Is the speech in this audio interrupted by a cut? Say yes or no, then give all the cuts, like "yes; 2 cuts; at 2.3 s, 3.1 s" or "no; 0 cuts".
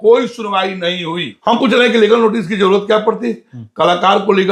yes; 1 cut; at 1.3 s